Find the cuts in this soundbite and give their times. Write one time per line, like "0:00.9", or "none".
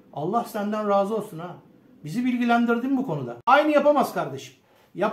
0:03.4